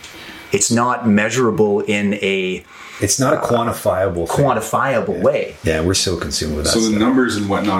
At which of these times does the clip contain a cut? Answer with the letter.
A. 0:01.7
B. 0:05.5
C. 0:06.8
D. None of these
B